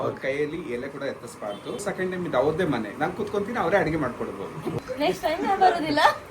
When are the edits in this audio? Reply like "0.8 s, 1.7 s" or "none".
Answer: 1.8 s, 4.8 s